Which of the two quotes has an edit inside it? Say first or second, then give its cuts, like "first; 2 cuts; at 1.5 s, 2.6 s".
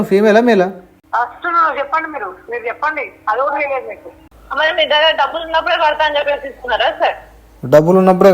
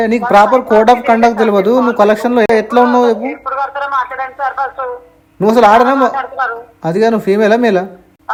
first; 1 cut; at 4.2 s